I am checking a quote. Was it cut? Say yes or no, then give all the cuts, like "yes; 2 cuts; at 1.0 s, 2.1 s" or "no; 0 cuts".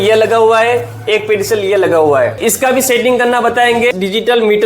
yes; 2 cuts; at 2.4 s, 3.9 s